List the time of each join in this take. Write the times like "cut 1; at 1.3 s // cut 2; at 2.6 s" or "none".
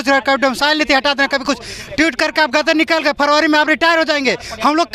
none